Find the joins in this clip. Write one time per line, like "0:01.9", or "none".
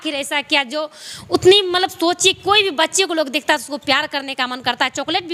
none